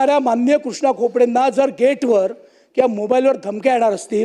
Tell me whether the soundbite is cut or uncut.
uncut